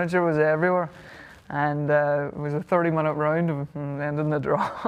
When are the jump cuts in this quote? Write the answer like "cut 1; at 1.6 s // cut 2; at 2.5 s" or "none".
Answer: none